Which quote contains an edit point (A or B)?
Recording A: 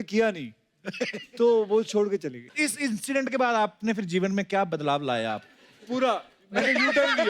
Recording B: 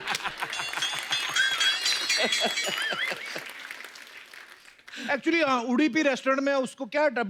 A